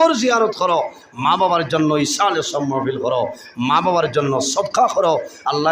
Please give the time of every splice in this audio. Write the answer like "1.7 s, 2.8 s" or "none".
none